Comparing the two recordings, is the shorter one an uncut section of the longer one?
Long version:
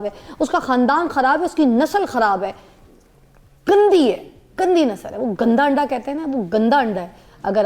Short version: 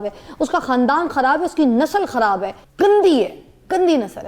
no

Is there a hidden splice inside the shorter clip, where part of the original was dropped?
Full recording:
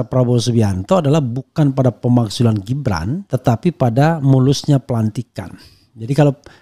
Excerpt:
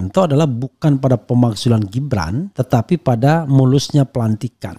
no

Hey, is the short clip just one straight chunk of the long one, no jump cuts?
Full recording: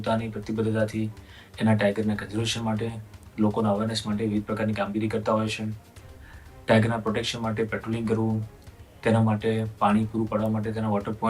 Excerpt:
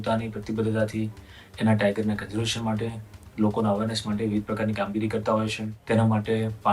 no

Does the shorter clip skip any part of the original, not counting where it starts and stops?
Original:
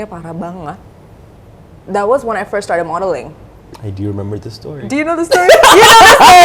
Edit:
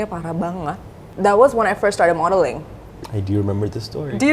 yes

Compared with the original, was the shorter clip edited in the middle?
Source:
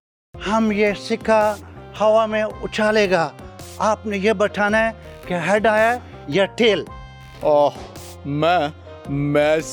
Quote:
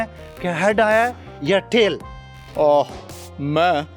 no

